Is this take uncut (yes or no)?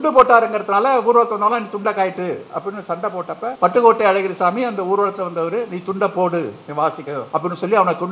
no